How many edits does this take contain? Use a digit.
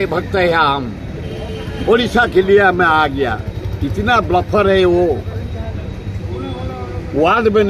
0